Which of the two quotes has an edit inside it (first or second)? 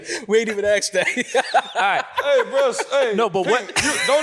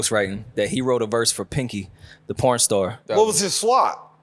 second